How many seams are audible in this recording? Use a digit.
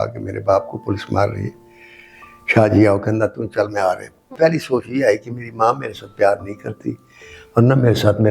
1